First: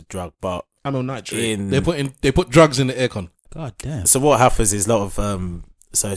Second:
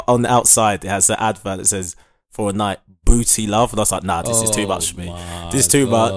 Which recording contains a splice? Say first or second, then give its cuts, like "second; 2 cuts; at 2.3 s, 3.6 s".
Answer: first; 1 cut; at 3.4 s